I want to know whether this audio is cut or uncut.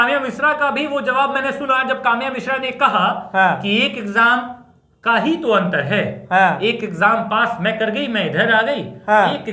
uncut